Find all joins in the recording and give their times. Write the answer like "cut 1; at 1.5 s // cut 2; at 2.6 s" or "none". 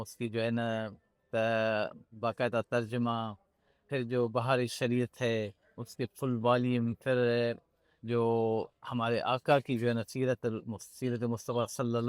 none